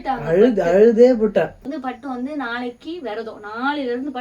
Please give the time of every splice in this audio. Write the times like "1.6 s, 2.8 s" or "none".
1.5 s

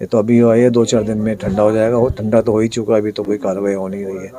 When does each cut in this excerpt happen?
none

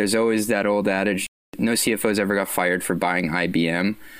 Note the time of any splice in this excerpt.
1.5 s

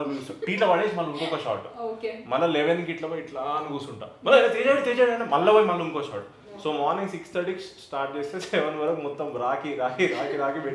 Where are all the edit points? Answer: none

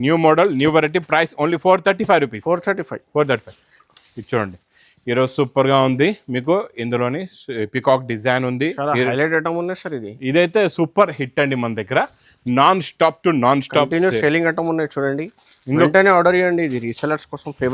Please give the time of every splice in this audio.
3.8 s

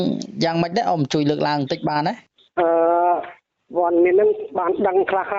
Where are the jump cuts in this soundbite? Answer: none

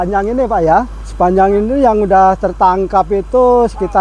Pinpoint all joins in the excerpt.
1.0 s

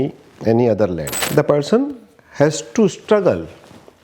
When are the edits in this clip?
1.2 s

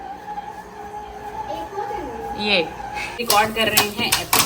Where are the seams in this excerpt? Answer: 3.2 s

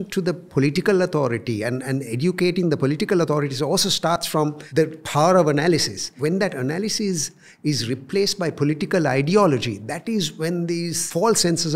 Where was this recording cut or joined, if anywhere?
4.3 s, 6.1 s

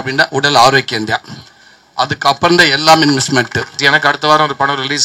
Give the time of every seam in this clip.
3.8 s

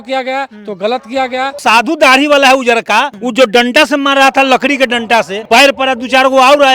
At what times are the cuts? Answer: 1.6 s, 3.2 s, 5.4 s

